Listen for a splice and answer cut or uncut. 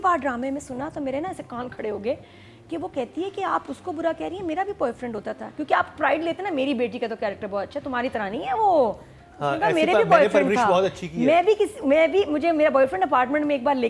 uncut